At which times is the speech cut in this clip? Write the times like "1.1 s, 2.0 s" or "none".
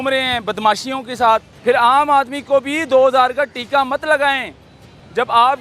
1.5 s